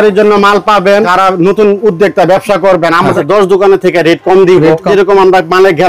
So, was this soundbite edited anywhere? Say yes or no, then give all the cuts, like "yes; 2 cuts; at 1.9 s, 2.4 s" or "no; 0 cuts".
yes; 3 cuts; at 1.1 s, 3.2 s, 4.9 s